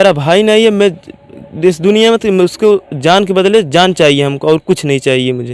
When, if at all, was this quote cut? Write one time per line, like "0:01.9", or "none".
none